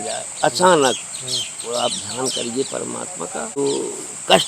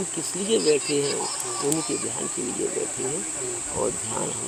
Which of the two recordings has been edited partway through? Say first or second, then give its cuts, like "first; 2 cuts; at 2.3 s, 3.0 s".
first; 1 cut; at 3.6 s